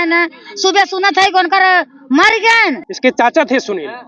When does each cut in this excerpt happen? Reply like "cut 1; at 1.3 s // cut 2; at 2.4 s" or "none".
cut 1; at 2.9 s